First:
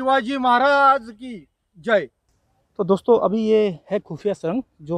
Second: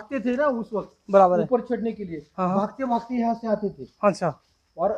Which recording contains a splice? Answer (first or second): first